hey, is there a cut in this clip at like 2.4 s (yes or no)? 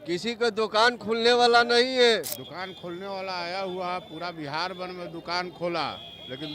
yes